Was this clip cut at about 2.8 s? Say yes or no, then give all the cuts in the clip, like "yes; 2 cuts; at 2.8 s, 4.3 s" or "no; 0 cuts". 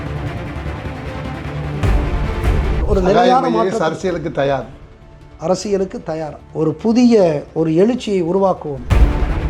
yes; 1 cut; at 2.8 s